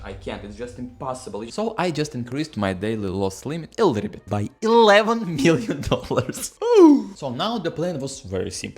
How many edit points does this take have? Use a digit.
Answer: 2